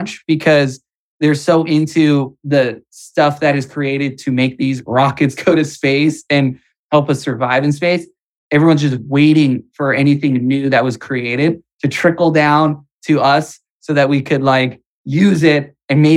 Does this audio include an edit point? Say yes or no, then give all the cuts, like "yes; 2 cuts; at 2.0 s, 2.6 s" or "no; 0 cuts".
no; 0 cuts